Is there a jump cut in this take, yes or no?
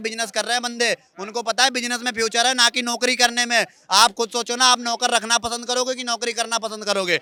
no